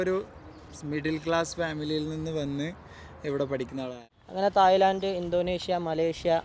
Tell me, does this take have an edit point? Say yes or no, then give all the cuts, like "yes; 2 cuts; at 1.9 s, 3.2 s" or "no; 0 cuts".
yes; 1 cut; at 3.9 s